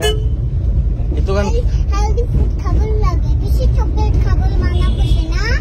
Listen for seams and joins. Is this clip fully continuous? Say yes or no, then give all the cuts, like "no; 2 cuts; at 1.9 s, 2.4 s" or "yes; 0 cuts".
yes; 0 cuts